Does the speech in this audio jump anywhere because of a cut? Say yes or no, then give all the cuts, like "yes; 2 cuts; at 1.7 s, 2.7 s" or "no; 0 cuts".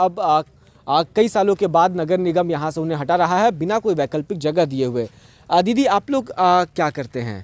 no; 0 cuts